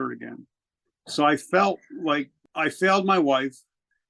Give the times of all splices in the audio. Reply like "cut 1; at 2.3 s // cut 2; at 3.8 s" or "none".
cut 1; at 2.4 s